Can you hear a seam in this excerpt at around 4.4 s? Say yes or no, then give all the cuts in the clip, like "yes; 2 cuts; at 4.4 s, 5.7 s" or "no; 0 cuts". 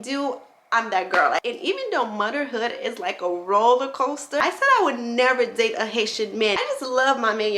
yes; 3 cuts; at 1.4 s, 4.4 s, 6.6 s